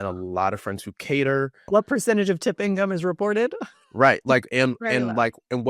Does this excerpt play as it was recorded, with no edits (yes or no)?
no